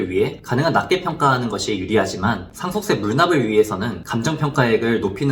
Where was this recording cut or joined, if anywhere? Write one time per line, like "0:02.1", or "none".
0:02.5
0:04.0

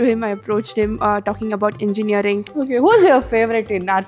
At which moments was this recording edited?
0:02.5

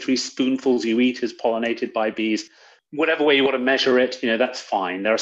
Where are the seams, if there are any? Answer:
0:02.7

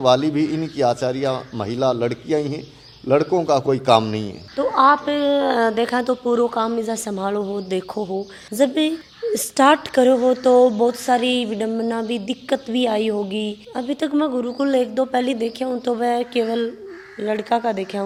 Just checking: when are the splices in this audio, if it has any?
none

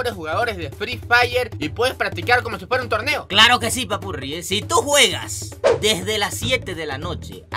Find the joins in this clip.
none

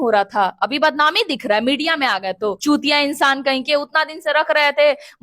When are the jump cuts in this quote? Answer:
0:02.6

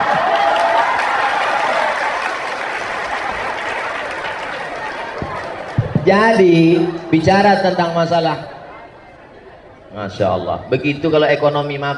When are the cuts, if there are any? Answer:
none

